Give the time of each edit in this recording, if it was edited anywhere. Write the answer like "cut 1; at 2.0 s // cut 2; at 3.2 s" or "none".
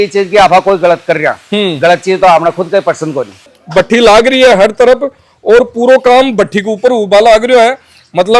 cut 1; at 3.5 s